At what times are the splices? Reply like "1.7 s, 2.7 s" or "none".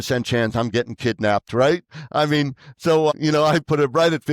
3.1 s